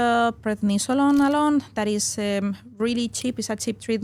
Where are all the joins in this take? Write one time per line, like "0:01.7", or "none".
none